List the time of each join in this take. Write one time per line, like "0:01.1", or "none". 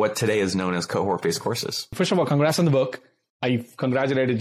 0:01.9